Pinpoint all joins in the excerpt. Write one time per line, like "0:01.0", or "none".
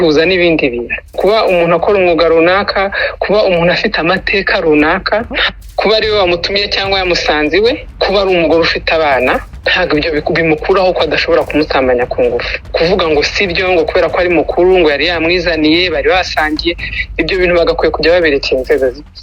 0:01.2
0:05.6
0:07.9
0:09.6
0:12.7